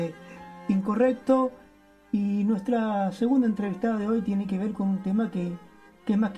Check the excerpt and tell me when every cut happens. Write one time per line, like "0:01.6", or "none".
0:03.1

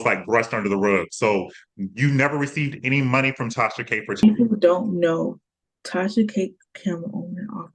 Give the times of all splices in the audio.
0:04.2

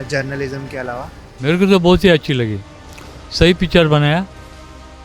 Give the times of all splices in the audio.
0:01.3

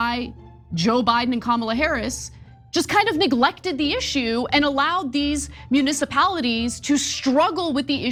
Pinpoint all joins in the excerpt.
none

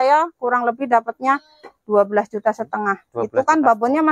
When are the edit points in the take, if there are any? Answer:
none

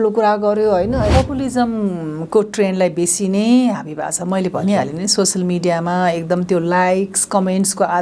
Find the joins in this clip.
0:01.1

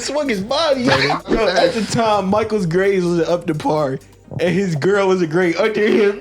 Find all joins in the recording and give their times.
0:01.2

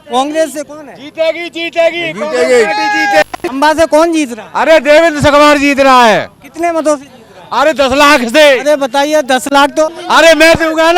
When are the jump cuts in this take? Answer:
0:03.4
0:10.0

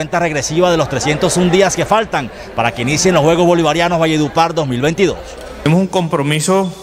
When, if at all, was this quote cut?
none

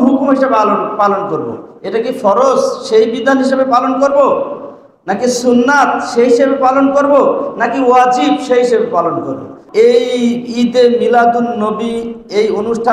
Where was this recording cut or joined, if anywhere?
0:09.6

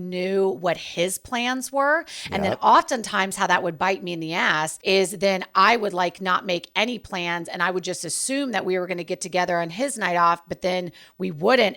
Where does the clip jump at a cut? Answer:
0:04.8

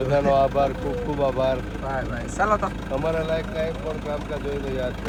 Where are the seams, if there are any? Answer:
none

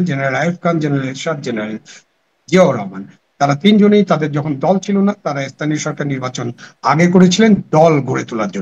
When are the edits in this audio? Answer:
none

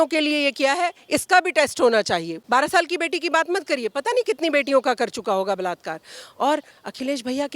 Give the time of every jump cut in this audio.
0:02.3

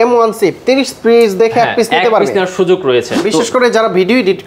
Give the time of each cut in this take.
0:03.1

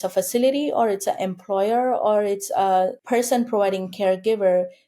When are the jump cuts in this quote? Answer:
0:03.0

